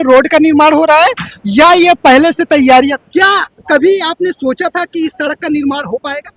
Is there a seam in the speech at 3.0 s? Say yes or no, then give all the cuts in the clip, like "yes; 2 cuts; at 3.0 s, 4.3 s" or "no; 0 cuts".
yes; 1 cut; at 3.0 s